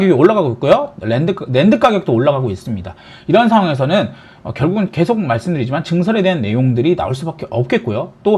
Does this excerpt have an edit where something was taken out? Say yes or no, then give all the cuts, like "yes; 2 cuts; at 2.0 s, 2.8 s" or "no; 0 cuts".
no; 0 cuts